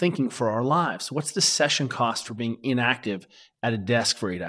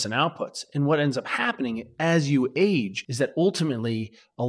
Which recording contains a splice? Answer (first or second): second